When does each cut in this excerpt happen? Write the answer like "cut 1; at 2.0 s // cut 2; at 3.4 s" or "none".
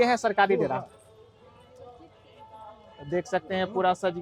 none

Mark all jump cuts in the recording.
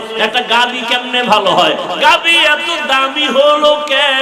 none

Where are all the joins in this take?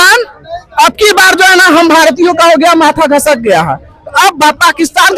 none

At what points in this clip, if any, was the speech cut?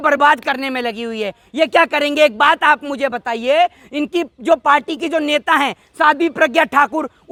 none

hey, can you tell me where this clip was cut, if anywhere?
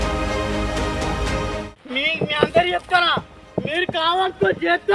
cut 1; at 0.9 s

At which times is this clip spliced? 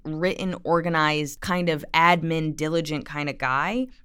cut 1; at 1.3 s

